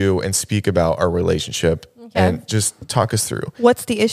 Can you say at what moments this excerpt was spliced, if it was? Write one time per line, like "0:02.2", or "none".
none